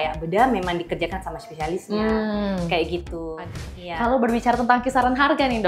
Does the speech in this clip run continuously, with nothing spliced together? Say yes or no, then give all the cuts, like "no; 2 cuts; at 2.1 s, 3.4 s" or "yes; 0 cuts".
no; 1 cut; at 3.5 s